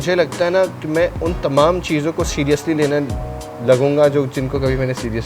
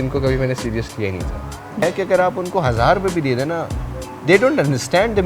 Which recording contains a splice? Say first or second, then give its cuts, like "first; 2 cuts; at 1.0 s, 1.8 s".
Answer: second; 1 cut; at 1.8 s